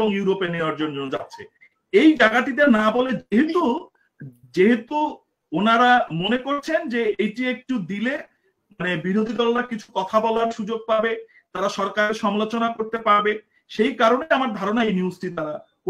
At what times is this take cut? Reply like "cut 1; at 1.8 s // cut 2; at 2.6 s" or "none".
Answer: none